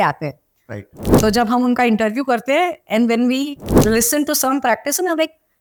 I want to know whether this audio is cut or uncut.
uncut